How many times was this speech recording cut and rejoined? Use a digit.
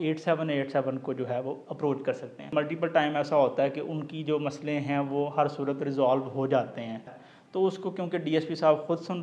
2